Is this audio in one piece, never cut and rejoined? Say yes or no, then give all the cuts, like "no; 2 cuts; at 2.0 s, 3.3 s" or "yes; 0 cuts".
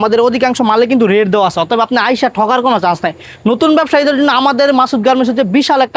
yes; 0 cuts